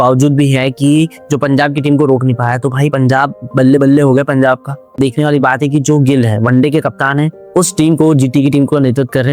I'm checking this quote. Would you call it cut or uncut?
cut